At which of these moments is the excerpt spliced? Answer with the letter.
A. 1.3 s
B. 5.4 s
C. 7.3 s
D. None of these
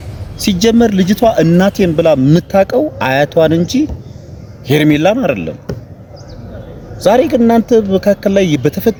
D